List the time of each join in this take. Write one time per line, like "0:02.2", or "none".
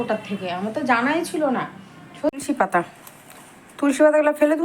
0:02.3